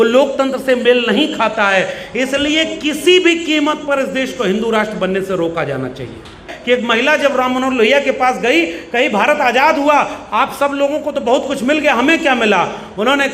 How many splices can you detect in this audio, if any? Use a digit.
1